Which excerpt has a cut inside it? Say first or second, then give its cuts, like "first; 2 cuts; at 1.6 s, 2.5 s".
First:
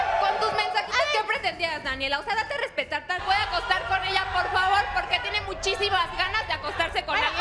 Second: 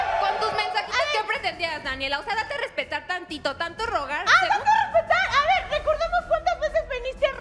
second; 1 cut; at 3.2 s